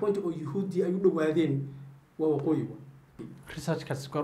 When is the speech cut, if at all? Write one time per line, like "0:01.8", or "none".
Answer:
0:03.2